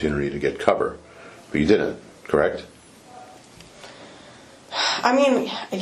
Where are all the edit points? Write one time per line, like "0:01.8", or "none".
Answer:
none

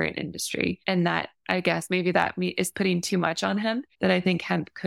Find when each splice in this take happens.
0:01.1
0:03.9

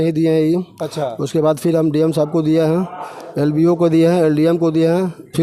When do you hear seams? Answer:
none

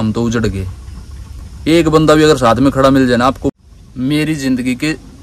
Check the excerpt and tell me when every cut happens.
0:03.5

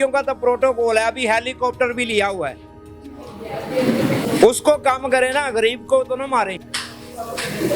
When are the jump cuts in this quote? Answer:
none

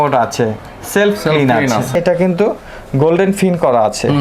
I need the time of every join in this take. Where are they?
0:01.9

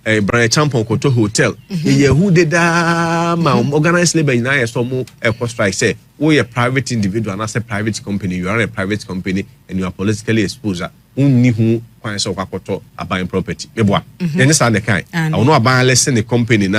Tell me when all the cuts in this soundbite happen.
none

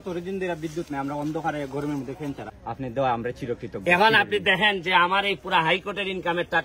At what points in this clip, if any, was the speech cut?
0:02.5

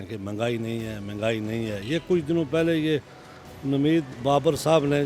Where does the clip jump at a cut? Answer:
none

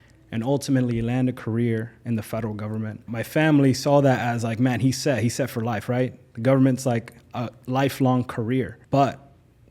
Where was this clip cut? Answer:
0:03.0
0:08.8

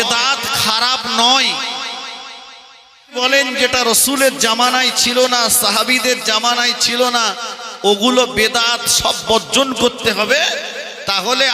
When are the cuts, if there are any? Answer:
0:03.2

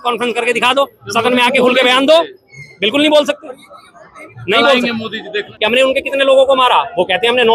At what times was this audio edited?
0:05.5

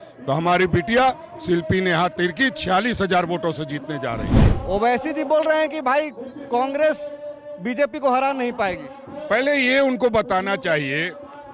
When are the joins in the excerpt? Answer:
0:04.4

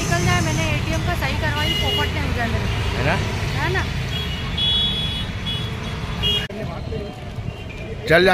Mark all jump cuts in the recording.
0:06.5

